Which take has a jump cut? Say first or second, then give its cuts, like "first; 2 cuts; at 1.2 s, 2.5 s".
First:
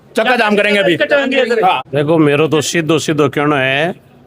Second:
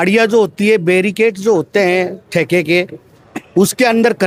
first; 1 cut; at 1.8 s